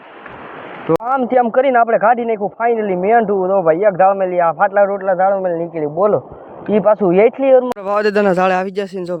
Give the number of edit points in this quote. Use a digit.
2